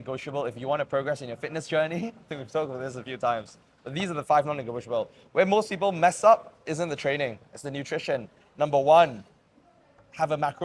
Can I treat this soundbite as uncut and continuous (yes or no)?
yes